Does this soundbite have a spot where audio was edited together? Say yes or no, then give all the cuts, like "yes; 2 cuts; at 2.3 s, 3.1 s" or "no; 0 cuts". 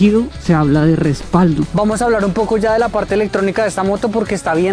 yes; 1 cut; at 1.7 s